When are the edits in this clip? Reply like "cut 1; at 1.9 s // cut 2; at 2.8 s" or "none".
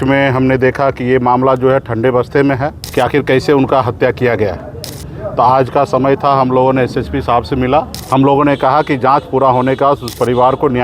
cut 1; at 2.8 s // cut 2; at 8.0 s